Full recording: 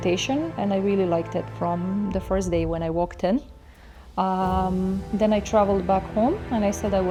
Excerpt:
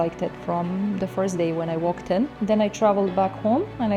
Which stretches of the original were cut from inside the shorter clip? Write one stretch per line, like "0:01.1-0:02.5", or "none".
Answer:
0:03.5-0:05.1